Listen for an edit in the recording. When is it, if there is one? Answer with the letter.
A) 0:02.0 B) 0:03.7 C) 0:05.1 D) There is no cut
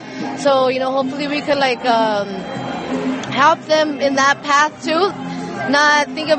C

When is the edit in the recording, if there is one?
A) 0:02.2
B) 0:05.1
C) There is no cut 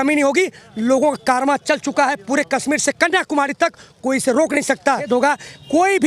B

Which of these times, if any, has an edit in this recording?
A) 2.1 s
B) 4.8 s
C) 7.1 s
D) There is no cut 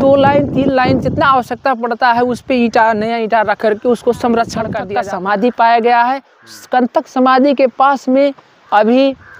B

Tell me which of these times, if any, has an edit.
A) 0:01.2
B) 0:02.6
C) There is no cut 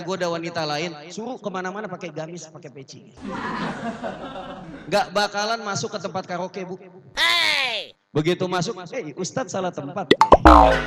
C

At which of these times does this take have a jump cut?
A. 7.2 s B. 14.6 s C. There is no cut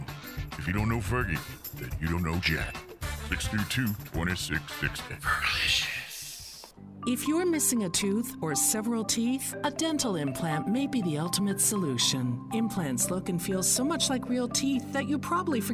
A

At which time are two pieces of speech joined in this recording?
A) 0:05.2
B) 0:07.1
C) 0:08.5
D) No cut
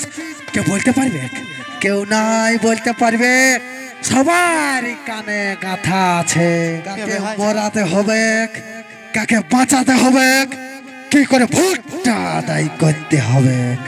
B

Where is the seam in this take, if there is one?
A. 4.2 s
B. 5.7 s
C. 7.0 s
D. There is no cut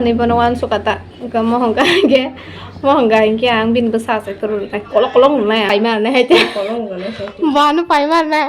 B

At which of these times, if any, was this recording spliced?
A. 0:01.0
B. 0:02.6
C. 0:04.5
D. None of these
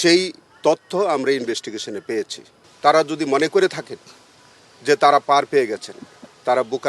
B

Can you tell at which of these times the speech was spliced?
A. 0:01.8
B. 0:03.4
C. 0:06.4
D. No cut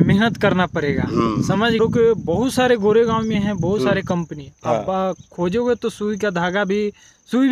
A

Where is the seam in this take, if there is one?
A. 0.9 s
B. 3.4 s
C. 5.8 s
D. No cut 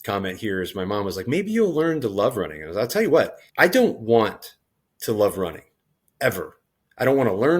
B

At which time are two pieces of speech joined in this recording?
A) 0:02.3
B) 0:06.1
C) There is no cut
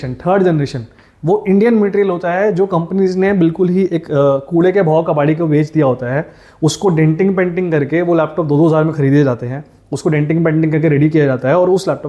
C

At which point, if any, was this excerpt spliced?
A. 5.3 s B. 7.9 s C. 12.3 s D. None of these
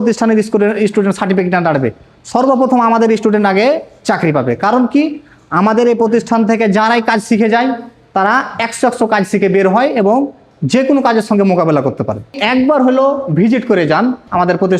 C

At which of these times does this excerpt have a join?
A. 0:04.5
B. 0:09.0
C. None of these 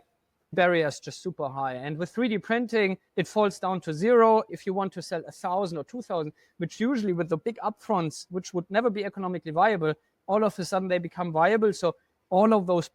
A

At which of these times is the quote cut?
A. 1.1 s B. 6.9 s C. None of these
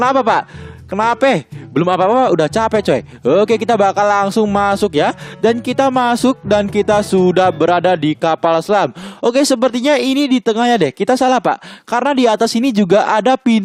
B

